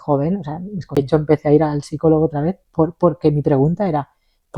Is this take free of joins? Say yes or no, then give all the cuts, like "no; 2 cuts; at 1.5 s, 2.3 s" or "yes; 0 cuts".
no; 1 cut; at 1.0 s